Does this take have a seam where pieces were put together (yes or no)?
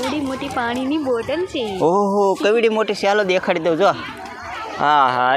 no